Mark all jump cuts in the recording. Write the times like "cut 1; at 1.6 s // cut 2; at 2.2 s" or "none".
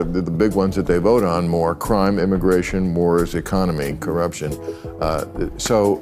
none